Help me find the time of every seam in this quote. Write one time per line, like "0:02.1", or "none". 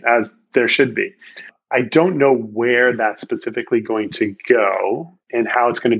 0:01.6